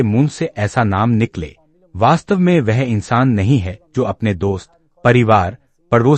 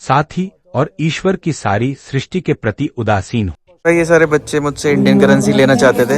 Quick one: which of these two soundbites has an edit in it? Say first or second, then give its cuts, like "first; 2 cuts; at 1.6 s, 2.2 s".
second; 1 cut; at 3.8 s